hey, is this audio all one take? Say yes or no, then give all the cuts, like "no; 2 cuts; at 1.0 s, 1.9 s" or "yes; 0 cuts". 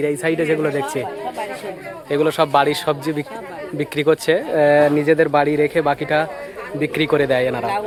yes; 0 cuts